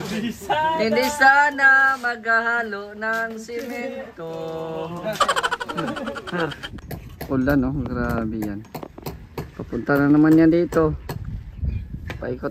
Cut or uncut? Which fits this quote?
cut